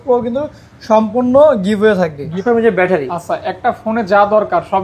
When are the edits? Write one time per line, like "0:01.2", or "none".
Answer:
0:02.4